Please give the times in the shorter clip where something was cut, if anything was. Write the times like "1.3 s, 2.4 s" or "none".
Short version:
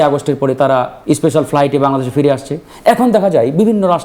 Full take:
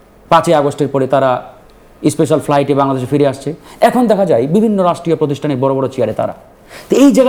0.9 s